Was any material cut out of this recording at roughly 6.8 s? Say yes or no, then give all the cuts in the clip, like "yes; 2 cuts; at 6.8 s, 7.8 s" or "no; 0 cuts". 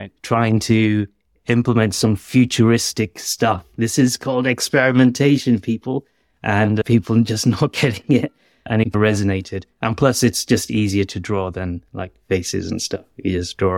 yes; 3 cuts; at 3.7 s, 6.8 s, 8.7 s